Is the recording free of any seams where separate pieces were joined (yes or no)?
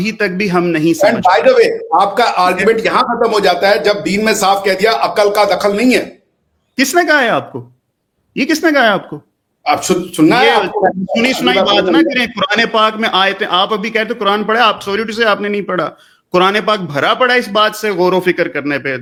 yes